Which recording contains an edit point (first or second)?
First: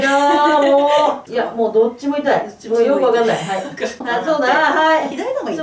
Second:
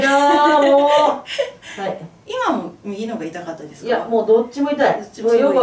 first